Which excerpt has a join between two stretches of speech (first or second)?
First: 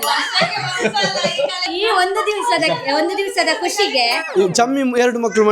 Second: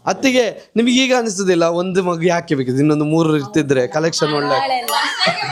first